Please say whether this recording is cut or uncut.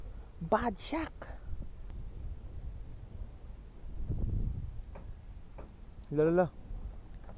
cut